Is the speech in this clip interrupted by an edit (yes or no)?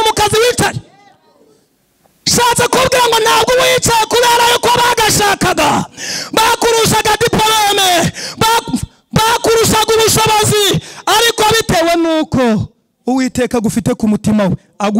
no